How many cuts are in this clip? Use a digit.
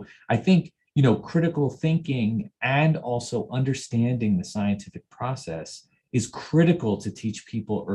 0